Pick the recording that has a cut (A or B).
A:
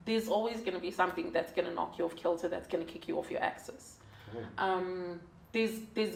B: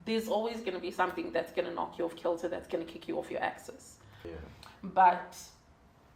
B